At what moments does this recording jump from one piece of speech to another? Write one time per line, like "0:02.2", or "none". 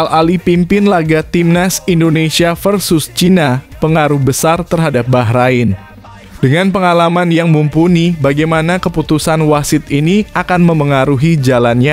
none